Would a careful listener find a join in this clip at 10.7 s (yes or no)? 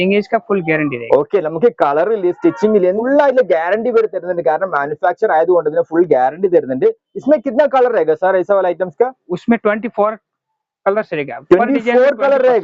no